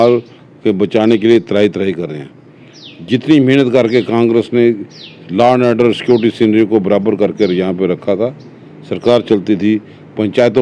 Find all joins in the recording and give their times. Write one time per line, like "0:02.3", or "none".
none

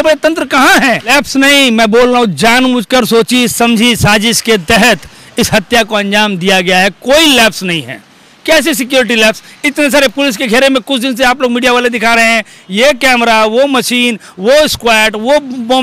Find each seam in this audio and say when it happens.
0:01.1

